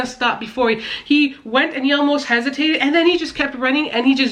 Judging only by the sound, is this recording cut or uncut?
uncut